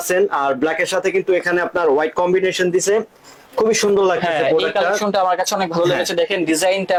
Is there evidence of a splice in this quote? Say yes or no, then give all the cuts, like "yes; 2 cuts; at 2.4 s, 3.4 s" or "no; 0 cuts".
no; 0 cuts